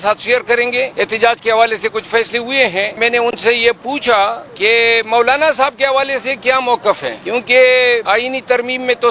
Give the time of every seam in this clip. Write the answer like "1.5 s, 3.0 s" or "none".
0.9 s, 3.0 s, 4.5 s, 7.2 s, 8.0 s